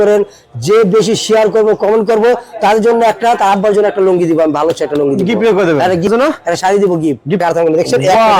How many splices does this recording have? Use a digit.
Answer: 2